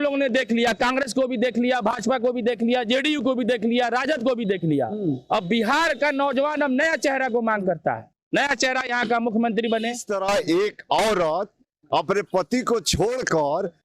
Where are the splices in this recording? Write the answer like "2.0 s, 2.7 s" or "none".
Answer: 10.0 s